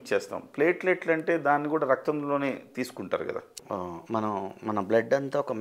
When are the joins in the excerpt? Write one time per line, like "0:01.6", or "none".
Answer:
0:03.6